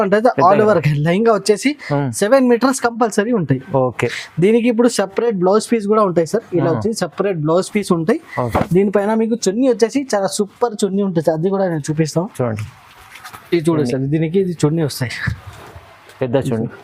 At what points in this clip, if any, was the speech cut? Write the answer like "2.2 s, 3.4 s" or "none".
none